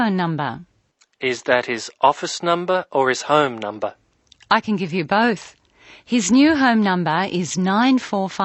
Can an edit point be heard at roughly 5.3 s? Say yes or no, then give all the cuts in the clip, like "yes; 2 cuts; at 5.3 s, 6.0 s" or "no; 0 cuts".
no; 0 cuts